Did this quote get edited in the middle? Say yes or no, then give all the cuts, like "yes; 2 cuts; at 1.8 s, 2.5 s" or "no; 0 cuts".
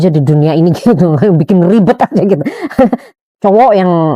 yes; 1 cut; at 3.0 s